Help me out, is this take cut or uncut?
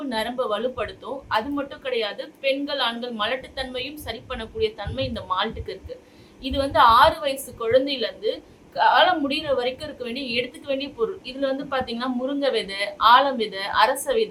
uncut